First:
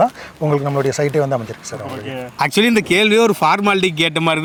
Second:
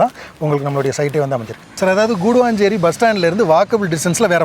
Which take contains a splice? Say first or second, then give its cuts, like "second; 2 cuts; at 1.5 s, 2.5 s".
second; 1 cut; at 1.6 s